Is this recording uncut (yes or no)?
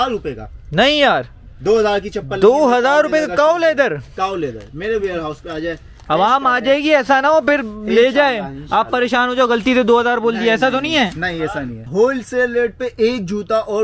no